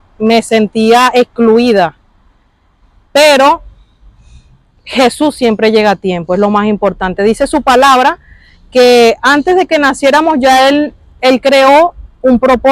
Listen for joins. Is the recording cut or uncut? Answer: uncut